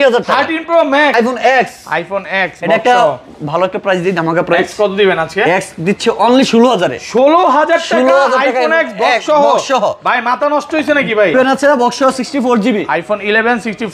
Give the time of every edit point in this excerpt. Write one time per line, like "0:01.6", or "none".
0:01.1
0:11.3